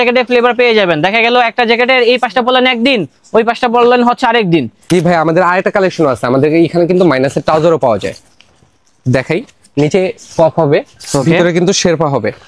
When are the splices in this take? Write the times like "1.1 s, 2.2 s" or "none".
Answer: 4.9 s